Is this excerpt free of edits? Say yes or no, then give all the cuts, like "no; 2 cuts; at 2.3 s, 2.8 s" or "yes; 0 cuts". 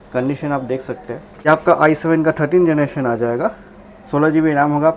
no; 1 cut; at 1.5 s